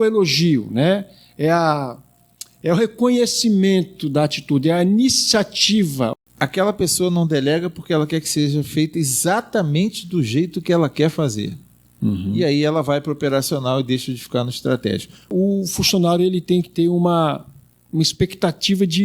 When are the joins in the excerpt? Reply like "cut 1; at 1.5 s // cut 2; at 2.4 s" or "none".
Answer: cut 1; at 6.1 s // cut 2; at 15.3 s